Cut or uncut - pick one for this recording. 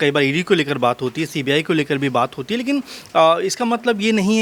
uncut